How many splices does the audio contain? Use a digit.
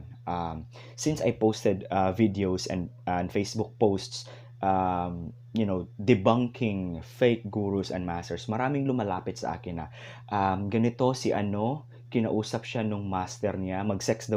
0